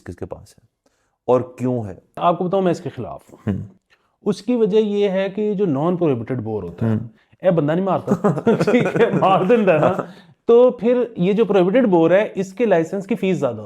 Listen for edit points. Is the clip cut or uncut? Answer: cut